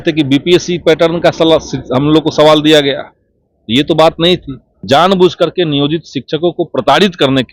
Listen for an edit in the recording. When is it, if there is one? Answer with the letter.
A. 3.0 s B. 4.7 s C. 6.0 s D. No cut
B